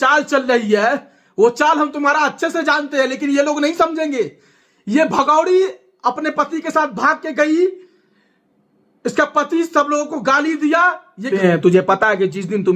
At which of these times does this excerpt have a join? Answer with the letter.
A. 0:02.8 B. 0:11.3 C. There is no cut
B